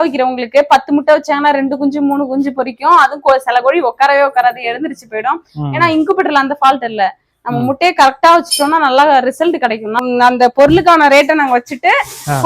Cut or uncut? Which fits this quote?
cut